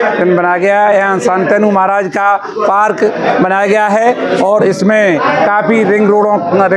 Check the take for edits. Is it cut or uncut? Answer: uncut